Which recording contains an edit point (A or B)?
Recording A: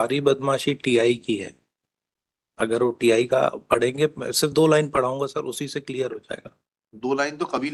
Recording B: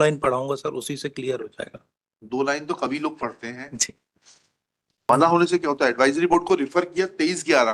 B